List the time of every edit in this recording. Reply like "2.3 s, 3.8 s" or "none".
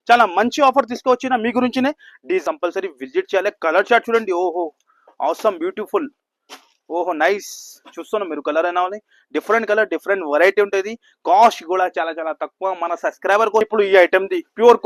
2.4 s, 13.6 s